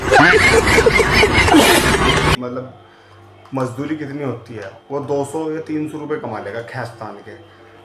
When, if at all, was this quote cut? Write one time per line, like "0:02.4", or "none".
0:02.4